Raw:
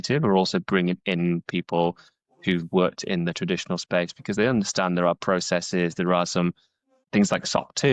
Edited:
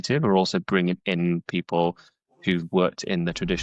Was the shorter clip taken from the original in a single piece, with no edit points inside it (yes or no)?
yes